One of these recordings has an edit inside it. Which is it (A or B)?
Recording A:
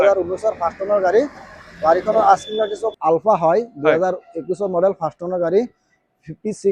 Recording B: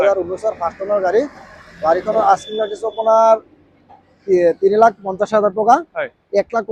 A